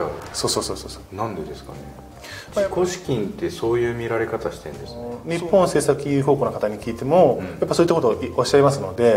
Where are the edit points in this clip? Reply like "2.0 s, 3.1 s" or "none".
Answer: 2.4 s, 5.2 s